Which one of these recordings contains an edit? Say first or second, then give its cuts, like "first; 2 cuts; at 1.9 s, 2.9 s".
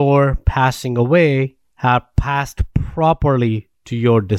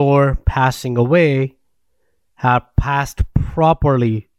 first; 1 cut; at 1.6 s